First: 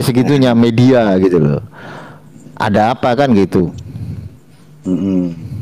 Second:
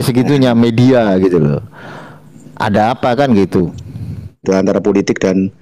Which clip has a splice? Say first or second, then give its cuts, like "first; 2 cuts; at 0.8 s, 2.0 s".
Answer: second; 1 cut; at 4.4 s